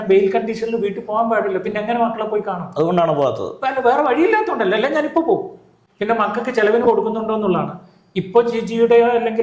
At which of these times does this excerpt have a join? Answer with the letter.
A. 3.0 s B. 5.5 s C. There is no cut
C